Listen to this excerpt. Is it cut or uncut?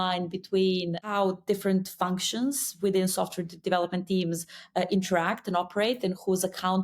cut